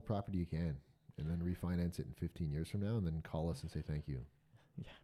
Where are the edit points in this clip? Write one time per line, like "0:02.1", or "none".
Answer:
none